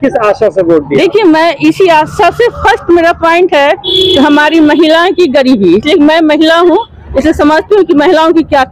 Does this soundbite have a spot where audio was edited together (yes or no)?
no